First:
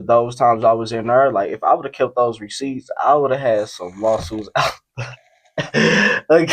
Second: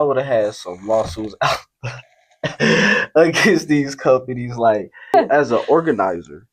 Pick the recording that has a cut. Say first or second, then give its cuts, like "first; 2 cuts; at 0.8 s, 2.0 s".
second; 1 cut; at 5.1 s